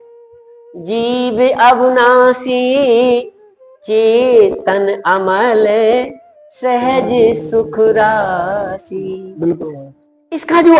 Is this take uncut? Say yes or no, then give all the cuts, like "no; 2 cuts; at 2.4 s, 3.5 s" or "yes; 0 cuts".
yes; 0 cuts